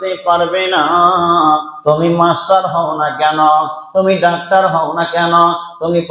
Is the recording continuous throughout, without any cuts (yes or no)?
no